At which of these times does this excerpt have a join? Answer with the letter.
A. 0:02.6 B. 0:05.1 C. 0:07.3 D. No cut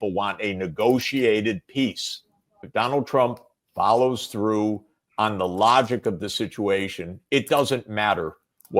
A